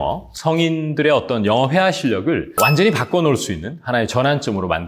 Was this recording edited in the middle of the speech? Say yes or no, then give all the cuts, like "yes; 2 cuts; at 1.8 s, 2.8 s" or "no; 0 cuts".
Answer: yes; 1 cut; at 2.5 s